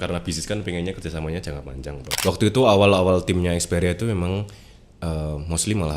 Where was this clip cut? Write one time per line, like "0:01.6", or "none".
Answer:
0:02.0